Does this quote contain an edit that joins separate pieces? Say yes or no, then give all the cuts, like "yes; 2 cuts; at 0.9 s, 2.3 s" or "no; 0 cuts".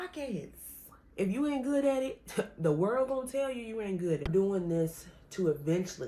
yes; 2 cuts; at 1.0 s, 4.3 s